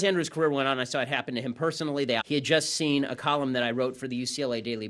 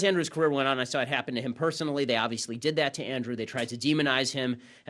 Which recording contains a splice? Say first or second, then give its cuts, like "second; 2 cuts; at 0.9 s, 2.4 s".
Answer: second; 1 cut; at 2.2 s